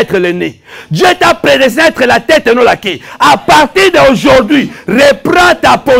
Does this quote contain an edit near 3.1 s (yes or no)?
no